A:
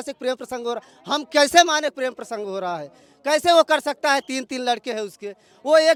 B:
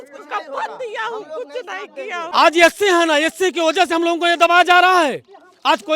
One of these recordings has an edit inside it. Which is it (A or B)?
B